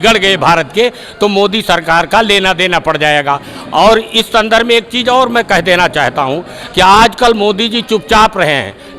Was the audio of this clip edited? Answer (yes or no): no